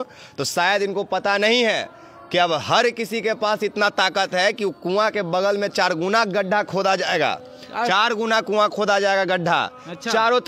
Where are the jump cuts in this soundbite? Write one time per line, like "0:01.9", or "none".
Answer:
none